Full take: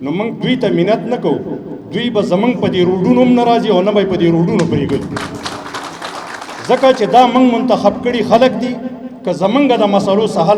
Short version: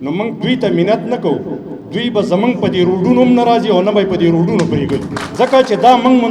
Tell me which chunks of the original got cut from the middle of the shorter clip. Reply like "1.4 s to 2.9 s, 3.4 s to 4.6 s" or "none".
5.2 s to 6.5 s